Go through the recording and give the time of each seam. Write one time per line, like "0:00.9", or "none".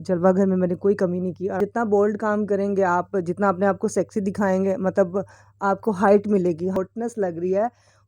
0:01.5
0:06.8